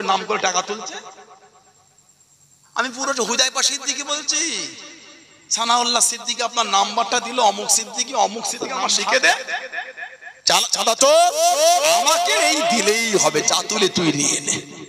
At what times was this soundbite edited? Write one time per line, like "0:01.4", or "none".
0:09.1